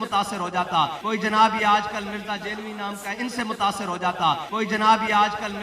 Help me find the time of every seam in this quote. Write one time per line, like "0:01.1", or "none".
none